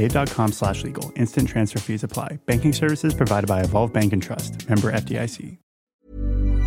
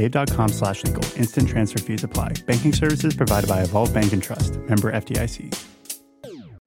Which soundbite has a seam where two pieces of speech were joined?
first; 1 cut; at 5.5 s

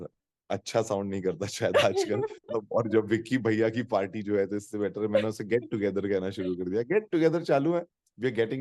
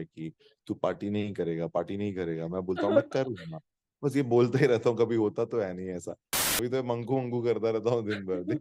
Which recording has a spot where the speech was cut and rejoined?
second; 1 cut; at 6.4 s

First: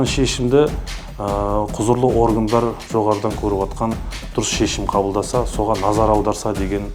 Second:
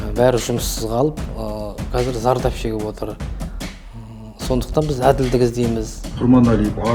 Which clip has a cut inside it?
second; 1 cut; at 6.0 s

